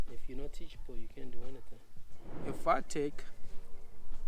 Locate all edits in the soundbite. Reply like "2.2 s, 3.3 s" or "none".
2.3 s

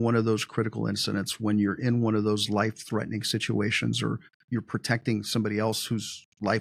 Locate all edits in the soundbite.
4.3 s

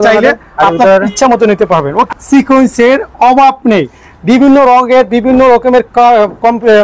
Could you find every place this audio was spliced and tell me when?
2.1 s

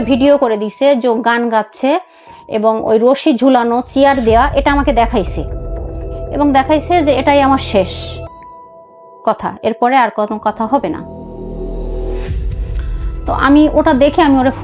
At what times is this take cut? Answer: none

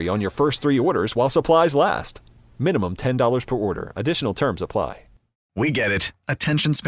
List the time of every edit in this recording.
5.5 s

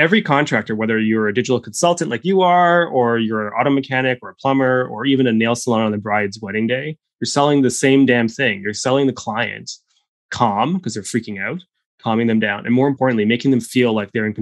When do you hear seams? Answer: 13.0 s

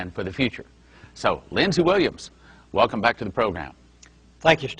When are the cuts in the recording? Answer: 1.5 s

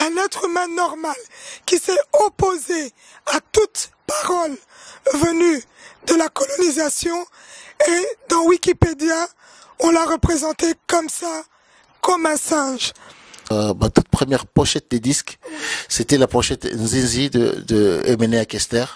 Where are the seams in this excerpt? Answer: 13.5 s

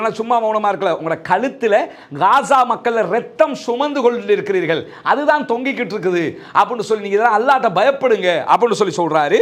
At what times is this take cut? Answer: none

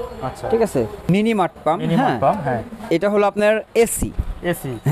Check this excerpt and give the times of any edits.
1.1 s

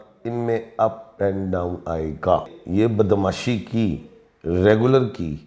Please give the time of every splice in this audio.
2.6 s

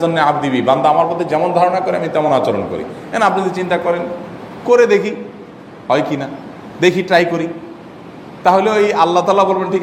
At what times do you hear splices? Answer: none

